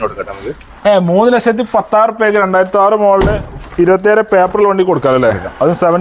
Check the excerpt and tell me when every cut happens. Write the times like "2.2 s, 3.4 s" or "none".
none